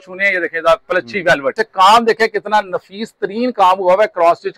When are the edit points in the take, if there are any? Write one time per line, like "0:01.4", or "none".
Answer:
0:01.6